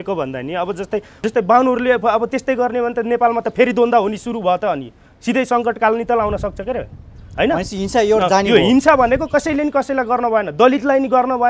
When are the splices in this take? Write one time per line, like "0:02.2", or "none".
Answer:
0:01.1